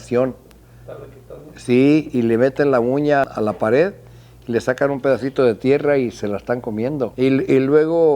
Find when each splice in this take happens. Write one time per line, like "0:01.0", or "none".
0:07.1